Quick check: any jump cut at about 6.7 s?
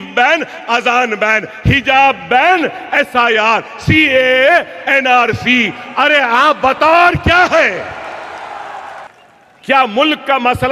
no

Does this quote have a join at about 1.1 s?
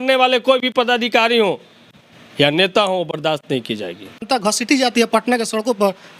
no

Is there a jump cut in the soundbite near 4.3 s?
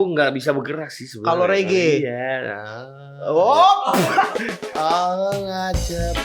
yes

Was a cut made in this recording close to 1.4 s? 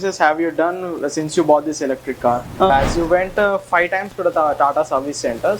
no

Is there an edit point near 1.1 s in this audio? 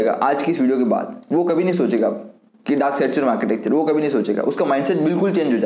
no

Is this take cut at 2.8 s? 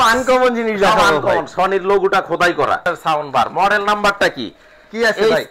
yes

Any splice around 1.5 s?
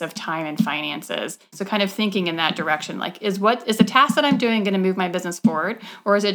yes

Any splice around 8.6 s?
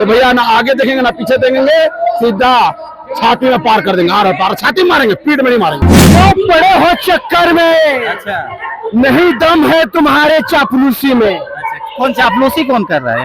no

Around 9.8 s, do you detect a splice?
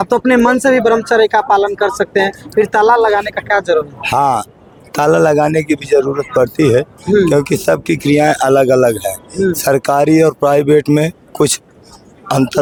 no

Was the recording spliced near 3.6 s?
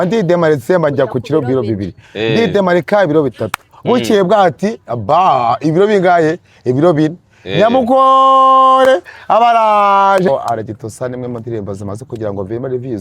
no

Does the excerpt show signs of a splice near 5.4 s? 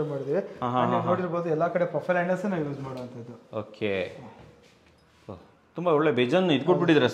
no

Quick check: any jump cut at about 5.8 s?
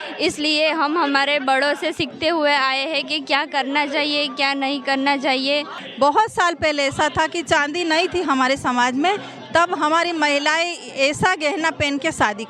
yes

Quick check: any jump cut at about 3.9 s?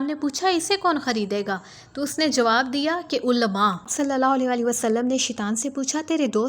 yes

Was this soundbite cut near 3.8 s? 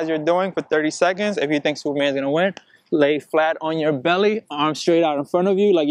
no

